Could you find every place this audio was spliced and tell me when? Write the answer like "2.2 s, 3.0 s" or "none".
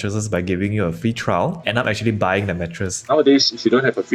1.7 s, 3.1 s